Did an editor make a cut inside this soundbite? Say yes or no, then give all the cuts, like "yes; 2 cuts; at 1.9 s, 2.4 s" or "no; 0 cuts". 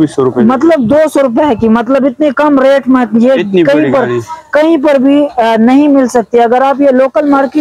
no; 0 cuts